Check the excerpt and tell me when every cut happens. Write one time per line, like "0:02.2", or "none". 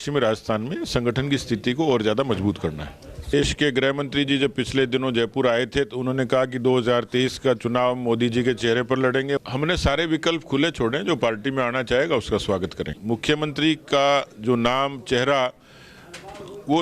0:03.3
0:09.4
0:12.9

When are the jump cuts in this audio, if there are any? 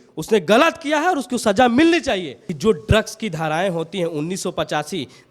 0:02.4

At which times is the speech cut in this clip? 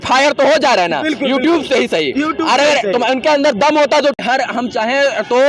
0:04.2

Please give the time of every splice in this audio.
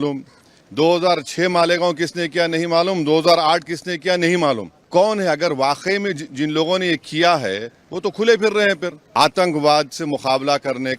0:04.7
0:09.0

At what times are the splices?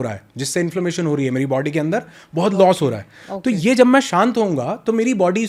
none

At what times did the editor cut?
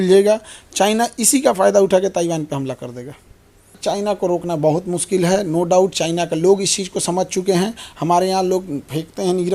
0:03.7

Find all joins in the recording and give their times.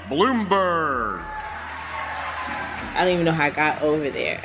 0:02.9

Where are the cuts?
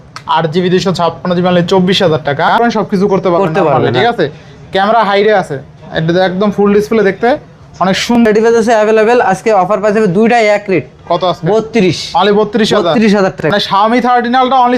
0:02.6
0:08.2
0:13.4

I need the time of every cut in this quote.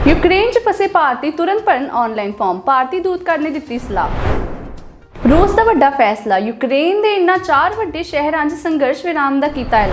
0:04.1
0:05.2

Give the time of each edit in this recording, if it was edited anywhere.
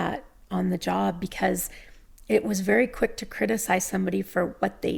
none

